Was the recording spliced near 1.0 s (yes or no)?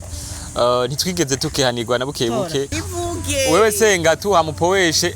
no